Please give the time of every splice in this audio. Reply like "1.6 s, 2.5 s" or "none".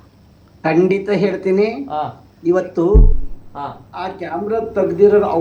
3.1 s

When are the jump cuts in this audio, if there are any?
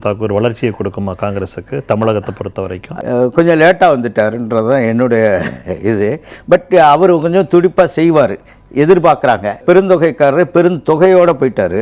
2.8 s, 9.6 s

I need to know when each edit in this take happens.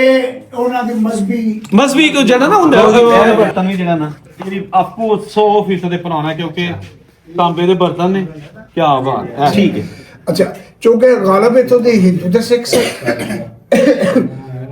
3.2 s, 9.5 s

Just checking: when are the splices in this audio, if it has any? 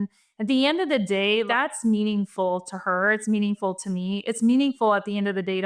1.5 s

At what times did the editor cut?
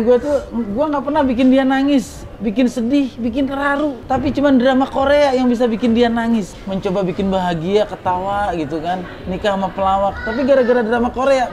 4.0 s, 6.6 s

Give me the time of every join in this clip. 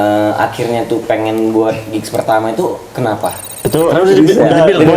3.5 s

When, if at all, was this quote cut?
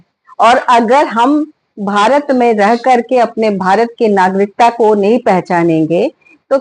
none

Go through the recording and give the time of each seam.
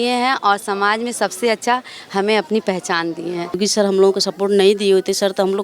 3.6 s

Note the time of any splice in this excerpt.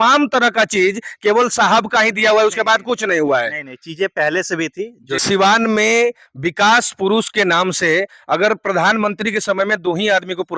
5.2 s

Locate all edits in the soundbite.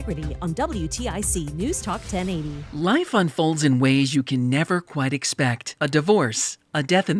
2.6 s

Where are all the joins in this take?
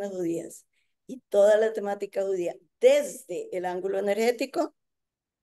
none

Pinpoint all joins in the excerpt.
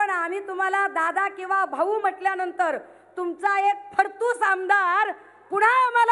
none

